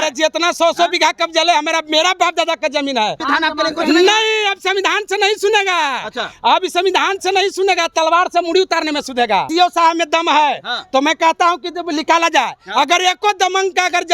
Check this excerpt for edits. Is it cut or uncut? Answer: cut